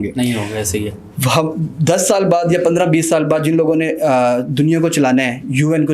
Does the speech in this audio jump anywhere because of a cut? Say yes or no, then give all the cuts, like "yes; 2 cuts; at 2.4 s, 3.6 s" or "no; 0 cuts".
no; 0 cuts